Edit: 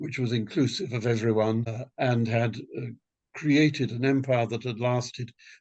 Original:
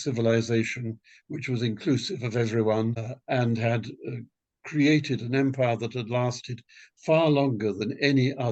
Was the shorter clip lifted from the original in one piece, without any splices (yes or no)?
yes